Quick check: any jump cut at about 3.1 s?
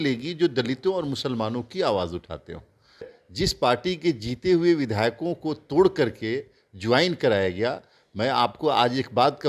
yes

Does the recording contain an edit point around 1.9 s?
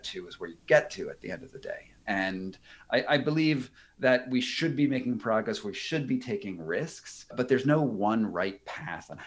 yes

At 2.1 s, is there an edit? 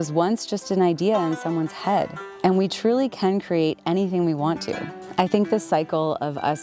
no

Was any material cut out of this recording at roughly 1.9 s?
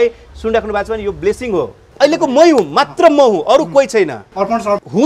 yes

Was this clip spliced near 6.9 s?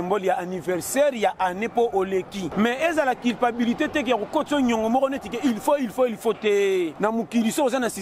yes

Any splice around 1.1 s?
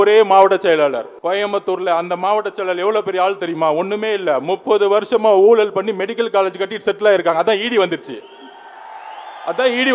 yes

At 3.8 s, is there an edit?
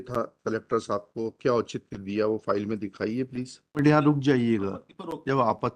yes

